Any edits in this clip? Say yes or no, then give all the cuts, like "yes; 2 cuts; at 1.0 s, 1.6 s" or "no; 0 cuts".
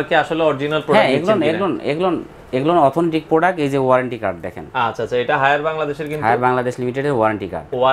no; 0 cuts